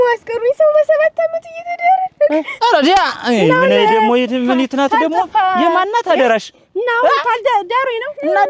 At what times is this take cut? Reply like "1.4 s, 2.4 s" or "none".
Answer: none